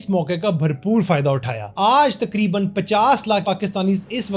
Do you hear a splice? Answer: yes; 2 cuts; at 1.6 s, 3.4 s

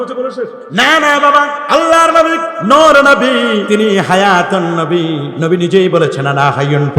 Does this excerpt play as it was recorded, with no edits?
no; 4 cuts; at 1.6 s, 2.5 s, 3.6 s, 5.3 s

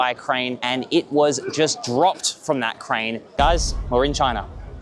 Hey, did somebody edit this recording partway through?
yes; 1 cut; at 3.3 s

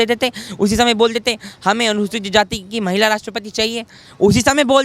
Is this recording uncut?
yes; 0 cuts

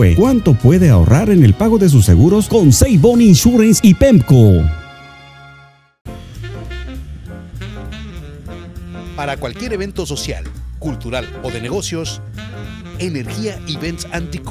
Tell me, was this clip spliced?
yes; 1 cut; at 5.9 s

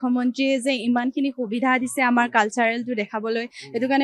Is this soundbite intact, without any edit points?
yes; 0 cuts

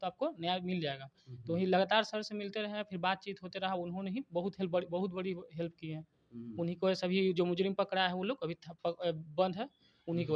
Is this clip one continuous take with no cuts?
yes; 0 cuts

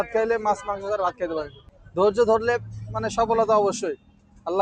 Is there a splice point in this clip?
no; 0 cuts

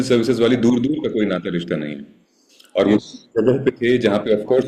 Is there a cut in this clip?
no; 0 cuts

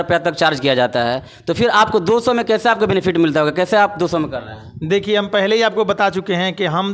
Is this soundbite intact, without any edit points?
yes; 0 cuts

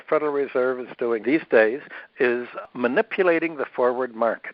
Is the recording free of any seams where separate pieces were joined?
no; 2 cuts; at 1.2 s, 2.7 s

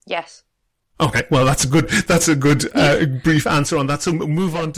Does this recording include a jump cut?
no; 0 cuts

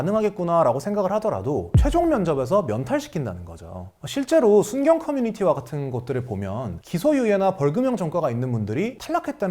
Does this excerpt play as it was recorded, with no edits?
yes; 0 cuts

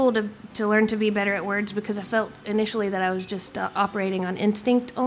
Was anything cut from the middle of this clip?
no; 0 cuts

